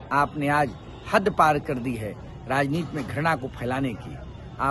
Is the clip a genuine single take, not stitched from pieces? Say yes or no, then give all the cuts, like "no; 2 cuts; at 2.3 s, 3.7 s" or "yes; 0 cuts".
yes; 0 cuts